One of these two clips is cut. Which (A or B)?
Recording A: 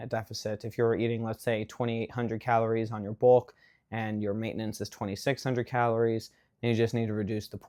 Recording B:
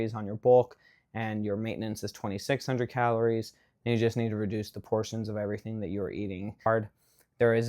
B